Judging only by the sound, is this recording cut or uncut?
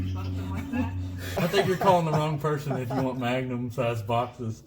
cut